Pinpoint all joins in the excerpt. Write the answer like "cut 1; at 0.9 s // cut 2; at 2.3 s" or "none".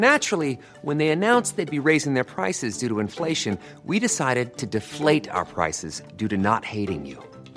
none